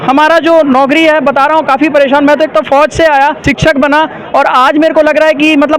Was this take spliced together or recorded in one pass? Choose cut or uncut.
cut